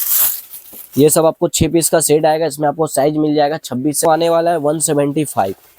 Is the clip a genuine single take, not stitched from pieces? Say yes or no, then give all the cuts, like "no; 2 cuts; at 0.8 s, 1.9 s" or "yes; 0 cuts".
no; 1 cut; at 4.0 s